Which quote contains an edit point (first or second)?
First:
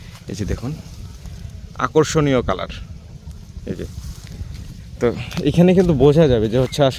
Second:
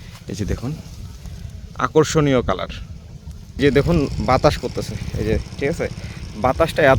second